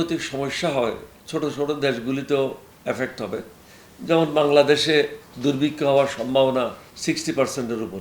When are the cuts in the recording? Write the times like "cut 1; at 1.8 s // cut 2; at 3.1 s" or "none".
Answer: cut 1; at 1.1 s // cut 2; at 6.9 s